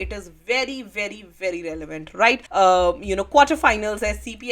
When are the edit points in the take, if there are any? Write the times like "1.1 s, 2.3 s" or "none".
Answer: 2.4 s